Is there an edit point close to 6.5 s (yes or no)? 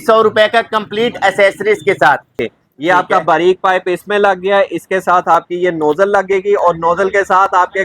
no